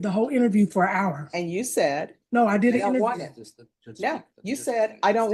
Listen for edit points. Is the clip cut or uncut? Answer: uncut